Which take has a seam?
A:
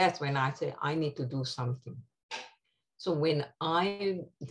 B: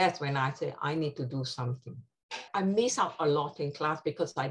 B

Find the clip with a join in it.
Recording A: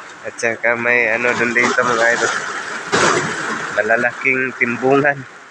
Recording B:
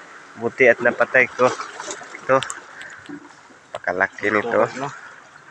A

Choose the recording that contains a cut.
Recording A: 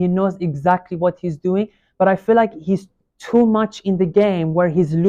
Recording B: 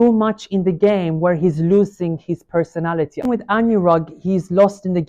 B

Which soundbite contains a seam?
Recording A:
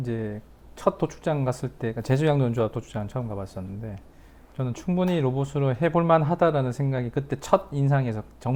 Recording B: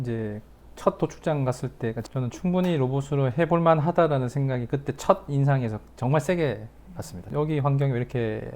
B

